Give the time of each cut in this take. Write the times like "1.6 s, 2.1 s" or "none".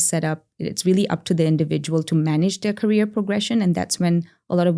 none